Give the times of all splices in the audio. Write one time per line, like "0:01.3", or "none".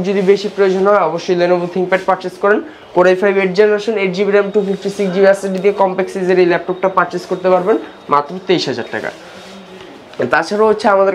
none